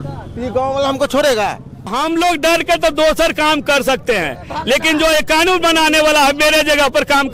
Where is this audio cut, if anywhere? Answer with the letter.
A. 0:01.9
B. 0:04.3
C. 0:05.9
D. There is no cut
A